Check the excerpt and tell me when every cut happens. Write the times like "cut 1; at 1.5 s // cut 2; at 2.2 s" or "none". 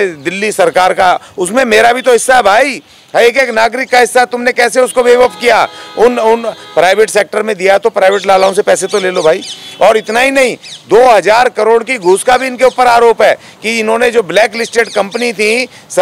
none